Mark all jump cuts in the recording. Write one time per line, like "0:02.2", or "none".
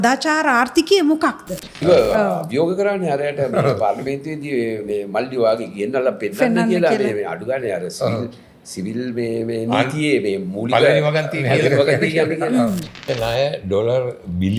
0:01.7
0:13.0